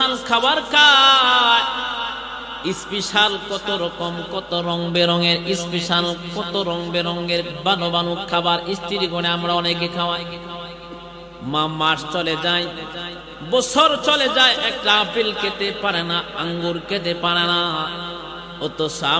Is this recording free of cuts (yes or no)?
yes